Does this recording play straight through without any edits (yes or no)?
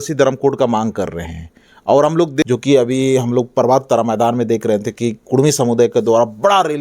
no